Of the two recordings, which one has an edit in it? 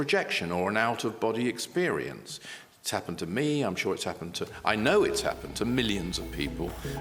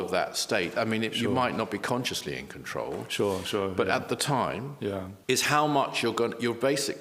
second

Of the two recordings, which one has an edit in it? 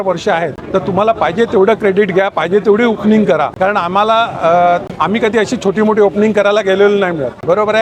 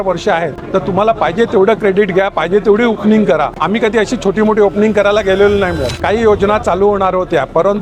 second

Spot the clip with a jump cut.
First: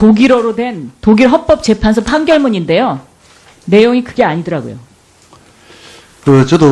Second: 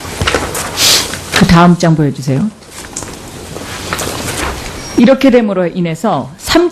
first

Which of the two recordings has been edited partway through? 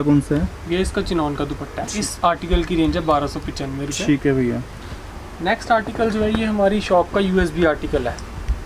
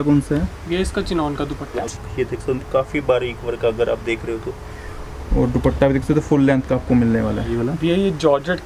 second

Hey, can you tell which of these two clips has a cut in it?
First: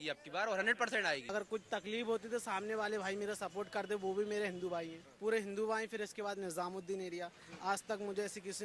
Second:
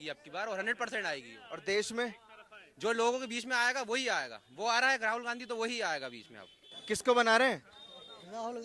first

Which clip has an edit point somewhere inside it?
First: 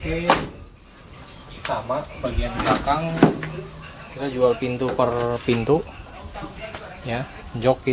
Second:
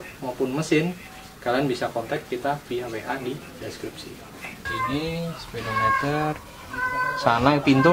second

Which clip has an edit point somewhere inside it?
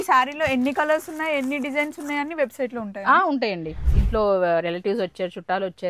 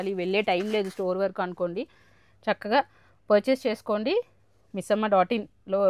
first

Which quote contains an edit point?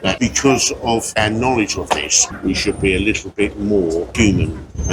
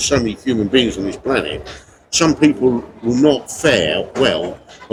first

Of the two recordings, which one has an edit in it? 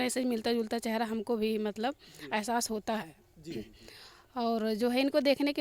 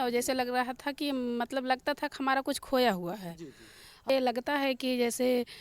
second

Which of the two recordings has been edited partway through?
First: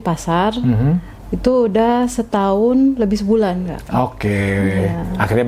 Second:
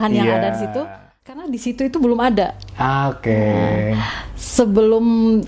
second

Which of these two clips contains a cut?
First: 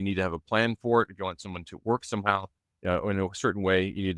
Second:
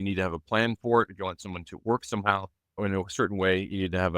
second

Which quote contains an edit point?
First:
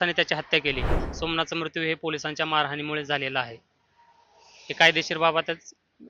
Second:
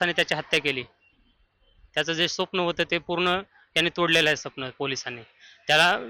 first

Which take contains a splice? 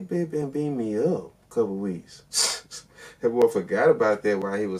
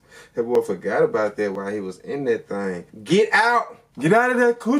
second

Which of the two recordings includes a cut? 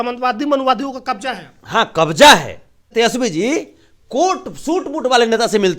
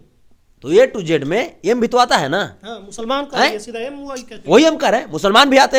first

